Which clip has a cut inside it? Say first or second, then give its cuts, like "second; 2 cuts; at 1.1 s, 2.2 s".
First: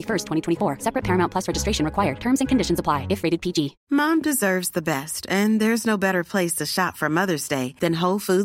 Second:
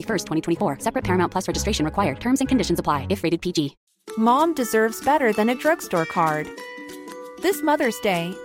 first; 1 cut; at 3.8 s